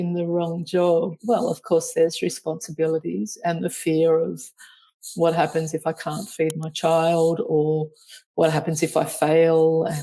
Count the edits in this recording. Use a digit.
1